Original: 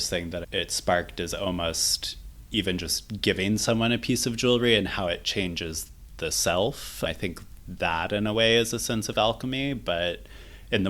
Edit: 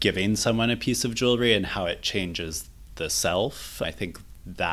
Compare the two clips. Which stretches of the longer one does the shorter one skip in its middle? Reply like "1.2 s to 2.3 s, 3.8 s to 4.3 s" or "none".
none